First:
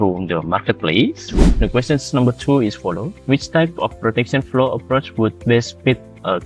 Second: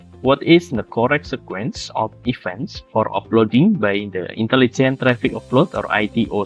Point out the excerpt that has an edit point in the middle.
first; 1 cut; at 1.4 s

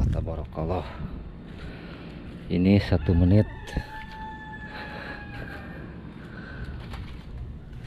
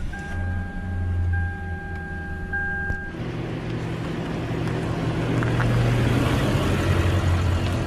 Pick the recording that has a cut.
second; 1 cut; at 3.1 s

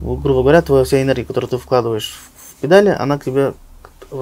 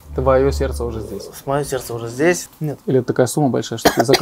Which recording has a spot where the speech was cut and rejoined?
second; 1 cut; at 2.4 s

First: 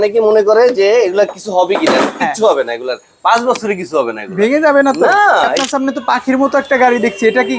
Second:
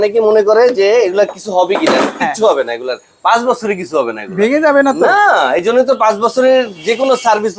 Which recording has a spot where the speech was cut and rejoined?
first; 1 cut; at 5.6 s

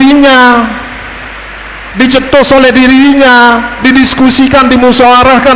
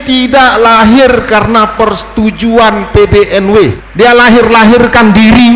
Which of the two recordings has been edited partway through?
second; 1 cut; at 3.8 s

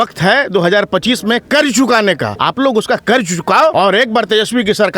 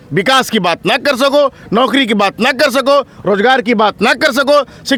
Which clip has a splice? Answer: first; 2 cuts; at 2.3 s, 3.7 s

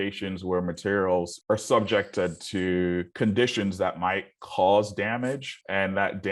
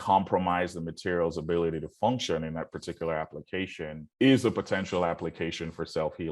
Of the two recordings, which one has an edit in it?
first; 1 cut; at 1.4 s

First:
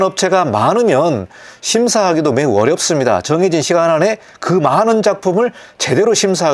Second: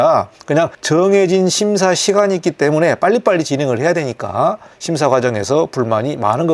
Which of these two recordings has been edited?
second; 1 cut; at 4.7 s

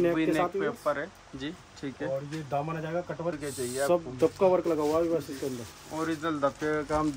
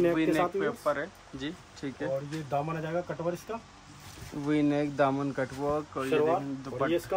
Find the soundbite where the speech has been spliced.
first; 1 cut; at 3.4 s

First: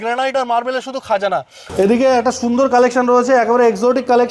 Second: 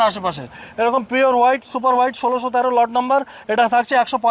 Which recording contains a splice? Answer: first; 1 cut; at 1.6 s

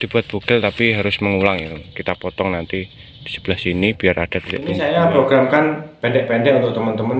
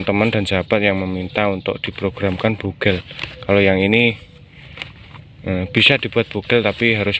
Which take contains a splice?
first; 1 cut; at 4.8 s

